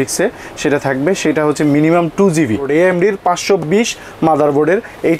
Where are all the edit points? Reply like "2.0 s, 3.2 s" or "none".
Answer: 2.7 s